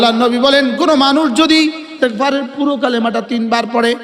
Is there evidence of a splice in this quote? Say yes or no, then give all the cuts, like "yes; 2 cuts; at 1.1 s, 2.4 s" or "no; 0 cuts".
yes; 1 cut; at 1.9 s